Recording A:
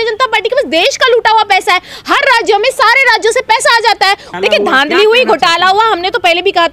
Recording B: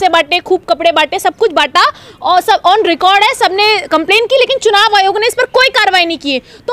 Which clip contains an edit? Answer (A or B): A